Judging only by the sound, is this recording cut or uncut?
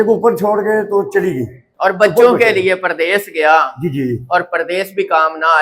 cut